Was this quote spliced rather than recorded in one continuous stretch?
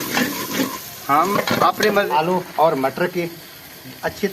yes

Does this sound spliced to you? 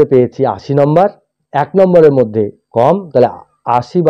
no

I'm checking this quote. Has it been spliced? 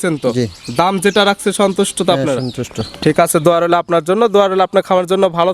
no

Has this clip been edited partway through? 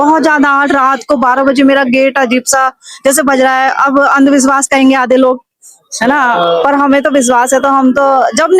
no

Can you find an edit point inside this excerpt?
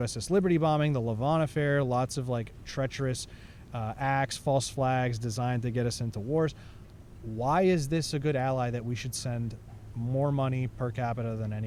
no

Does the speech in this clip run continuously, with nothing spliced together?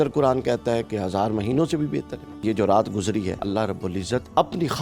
no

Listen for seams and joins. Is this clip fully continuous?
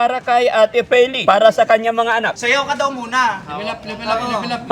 no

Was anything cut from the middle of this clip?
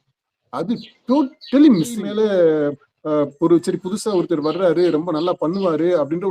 yes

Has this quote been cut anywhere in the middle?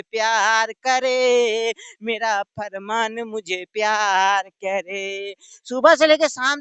no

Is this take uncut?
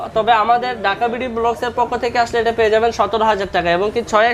yes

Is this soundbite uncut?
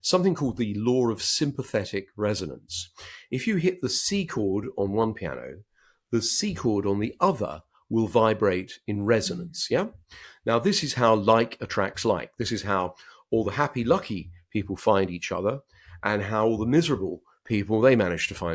yes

